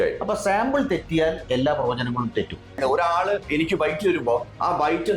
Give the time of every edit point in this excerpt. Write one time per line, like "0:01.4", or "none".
0:02.8